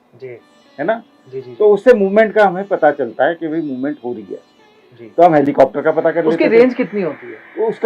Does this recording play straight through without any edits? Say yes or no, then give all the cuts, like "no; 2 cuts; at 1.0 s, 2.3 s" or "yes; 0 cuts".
yes; 0 cuts